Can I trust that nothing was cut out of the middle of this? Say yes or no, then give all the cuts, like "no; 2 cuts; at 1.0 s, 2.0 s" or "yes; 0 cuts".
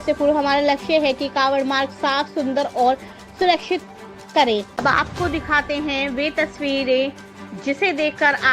no; 1 cut; at 4.7 s